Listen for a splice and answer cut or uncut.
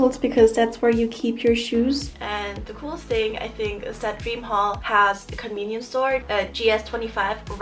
cut